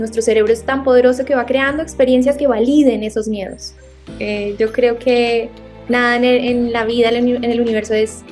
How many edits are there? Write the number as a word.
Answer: one